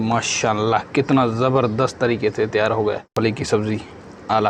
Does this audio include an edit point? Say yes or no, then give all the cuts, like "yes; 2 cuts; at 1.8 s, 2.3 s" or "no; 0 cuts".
yes; 1 cut; at 3.1 s